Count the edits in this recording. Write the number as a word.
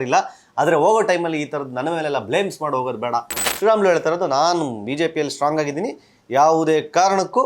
one